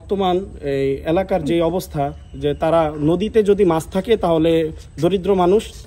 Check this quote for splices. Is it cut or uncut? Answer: uncut